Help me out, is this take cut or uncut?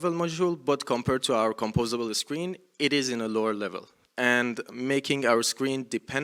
uncut